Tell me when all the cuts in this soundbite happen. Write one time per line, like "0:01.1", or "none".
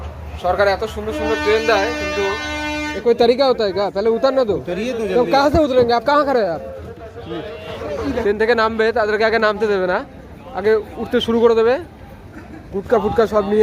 0:02.8
0:08.2